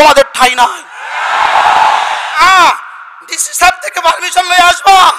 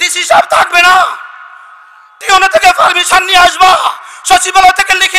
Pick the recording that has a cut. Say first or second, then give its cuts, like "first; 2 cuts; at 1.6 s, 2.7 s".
first; 1 cut; at 2.4 s